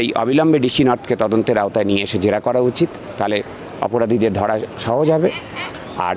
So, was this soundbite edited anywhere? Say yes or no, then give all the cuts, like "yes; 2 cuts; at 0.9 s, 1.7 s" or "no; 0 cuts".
no; 0 cuts